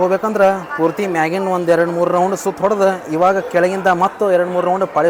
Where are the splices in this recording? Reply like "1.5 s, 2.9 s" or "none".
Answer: none